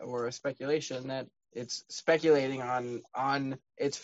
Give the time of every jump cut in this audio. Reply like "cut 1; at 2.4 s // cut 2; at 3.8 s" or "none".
cut 1; at 1.4 s